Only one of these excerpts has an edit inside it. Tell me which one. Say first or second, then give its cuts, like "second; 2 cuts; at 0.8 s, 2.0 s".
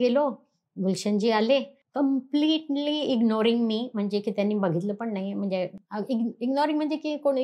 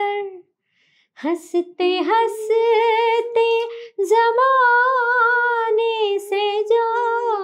first; 1 cut; at 1.8 s